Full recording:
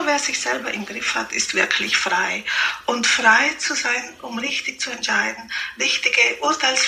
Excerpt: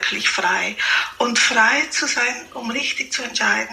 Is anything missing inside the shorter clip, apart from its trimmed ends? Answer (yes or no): no